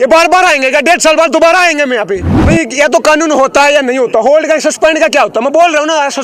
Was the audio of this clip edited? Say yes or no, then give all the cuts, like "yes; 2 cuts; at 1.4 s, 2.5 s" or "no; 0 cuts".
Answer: yes; 1 cut; at 2.3 s